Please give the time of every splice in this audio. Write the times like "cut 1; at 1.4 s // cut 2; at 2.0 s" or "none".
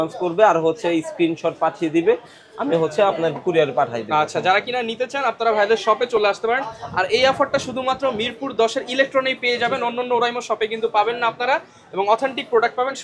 none